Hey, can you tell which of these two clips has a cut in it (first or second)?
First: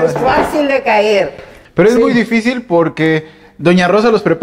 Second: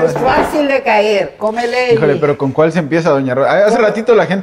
second